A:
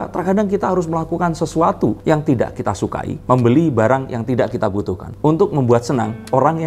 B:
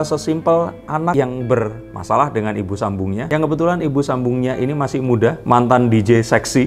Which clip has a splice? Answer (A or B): B